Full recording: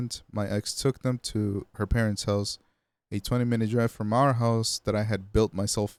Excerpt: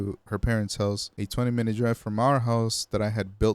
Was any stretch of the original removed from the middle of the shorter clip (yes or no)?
yes